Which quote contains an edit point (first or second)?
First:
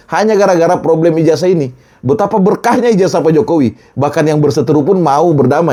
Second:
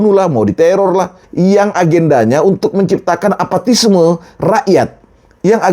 second